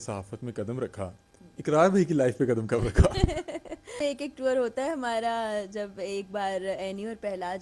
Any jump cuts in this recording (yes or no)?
yes